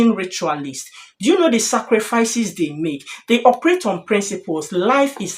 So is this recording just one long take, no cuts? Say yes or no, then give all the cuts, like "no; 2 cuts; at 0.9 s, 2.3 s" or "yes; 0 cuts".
yes; 0 cuts